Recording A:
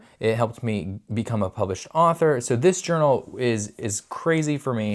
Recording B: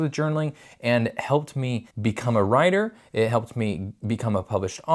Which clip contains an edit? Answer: B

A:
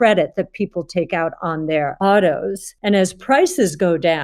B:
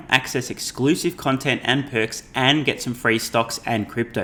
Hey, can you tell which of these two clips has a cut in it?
A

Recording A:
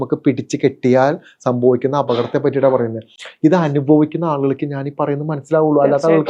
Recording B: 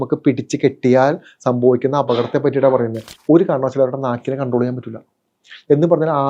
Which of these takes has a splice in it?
B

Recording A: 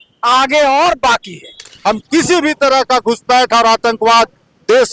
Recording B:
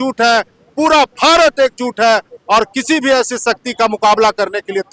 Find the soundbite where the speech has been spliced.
A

